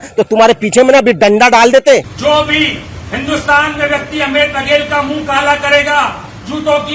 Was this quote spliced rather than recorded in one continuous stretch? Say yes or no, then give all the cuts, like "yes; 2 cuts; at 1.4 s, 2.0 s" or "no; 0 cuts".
yes; 1 cut; at 2.1 s